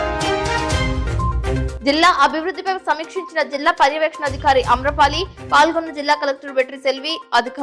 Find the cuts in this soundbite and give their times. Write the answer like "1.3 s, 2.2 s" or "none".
none